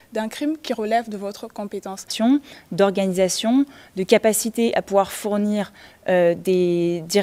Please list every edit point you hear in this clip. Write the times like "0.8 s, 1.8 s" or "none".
2.1 s